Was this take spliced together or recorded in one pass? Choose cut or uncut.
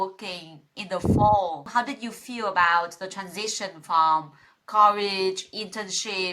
cut